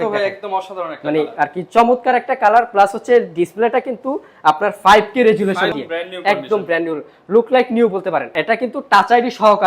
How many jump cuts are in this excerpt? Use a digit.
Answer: 2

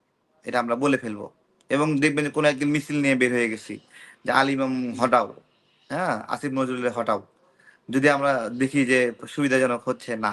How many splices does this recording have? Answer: 0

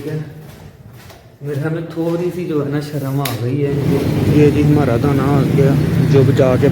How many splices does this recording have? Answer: 1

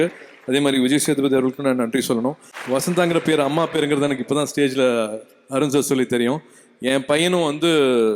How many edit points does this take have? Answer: 1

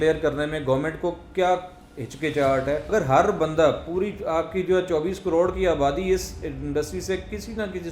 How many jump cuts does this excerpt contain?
1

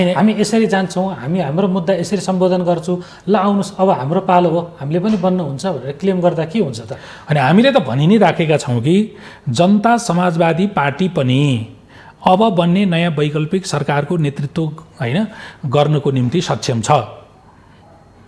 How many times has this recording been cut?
0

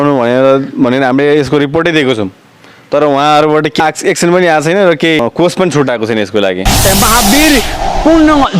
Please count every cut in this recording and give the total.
3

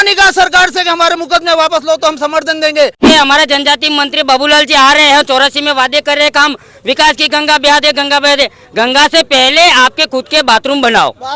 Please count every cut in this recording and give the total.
1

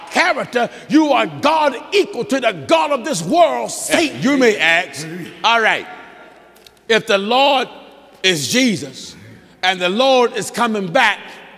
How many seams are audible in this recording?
1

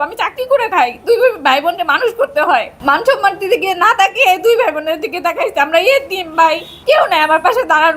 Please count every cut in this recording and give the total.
2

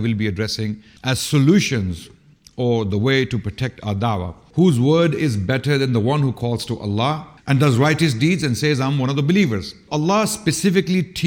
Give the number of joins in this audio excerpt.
4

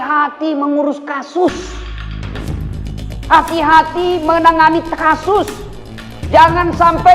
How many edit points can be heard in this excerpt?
2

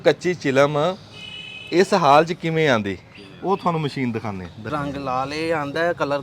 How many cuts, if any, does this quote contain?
1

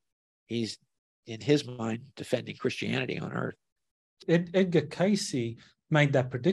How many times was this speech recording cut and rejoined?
1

